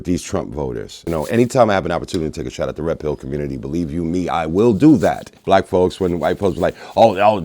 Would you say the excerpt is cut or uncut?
cut